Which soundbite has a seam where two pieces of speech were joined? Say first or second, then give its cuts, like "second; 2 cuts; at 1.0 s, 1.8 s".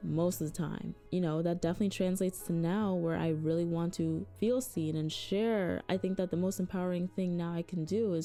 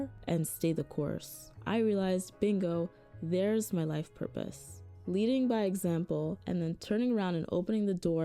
second; 2 cuts; at 1.6 s, 6.4 s